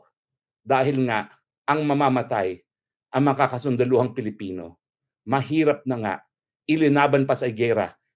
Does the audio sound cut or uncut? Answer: uncut